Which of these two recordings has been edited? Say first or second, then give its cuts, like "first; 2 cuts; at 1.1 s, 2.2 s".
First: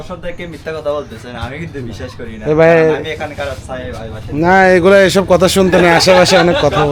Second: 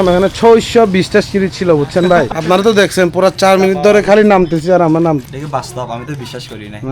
second; 2 cuts; at 2.3 s, 5.2 s